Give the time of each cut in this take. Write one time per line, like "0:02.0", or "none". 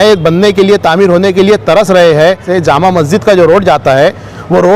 0:02.5